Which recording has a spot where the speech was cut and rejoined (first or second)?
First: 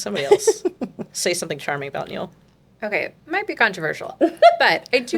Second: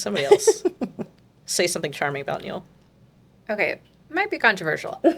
first